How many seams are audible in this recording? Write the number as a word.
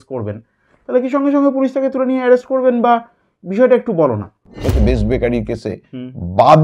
one